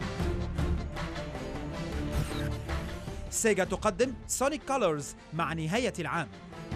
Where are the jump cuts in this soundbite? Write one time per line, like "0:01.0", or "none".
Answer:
none